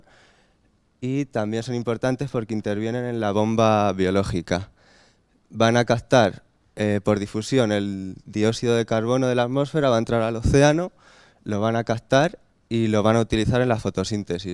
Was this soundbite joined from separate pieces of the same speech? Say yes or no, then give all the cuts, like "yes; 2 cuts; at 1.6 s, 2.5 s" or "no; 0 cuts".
no; 0 cuts